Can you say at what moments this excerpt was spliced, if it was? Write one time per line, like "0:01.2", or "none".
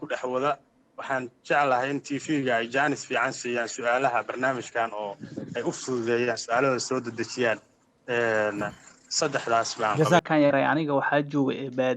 0:10.2